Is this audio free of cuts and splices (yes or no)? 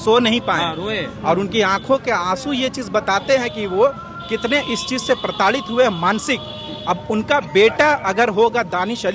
yes